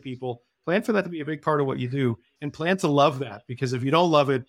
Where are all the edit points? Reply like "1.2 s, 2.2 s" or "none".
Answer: 2.3 s